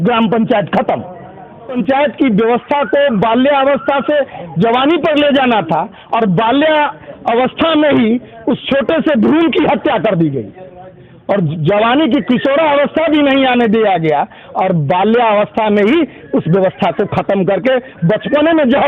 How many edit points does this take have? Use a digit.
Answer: 1